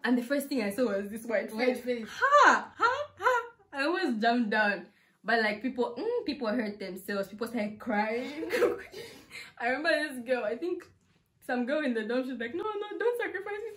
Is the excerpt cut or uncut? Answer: uncut